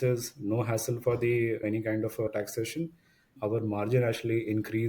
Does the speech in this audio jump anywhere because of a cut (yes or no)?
yes